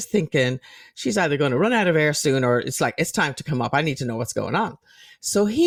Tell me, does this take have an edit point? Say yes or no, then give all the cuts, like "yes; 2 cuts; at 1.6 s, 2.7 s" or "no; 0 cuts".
no; 0 cuts